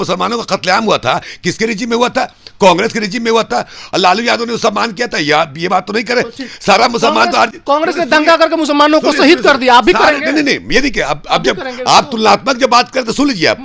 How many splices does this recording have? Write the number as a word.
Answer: zero